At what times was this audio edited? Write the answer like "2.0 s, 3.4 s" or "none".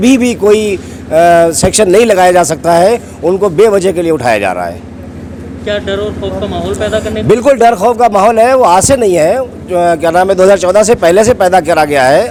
none